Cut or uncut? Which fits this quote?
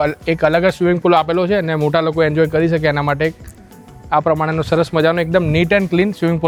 uncut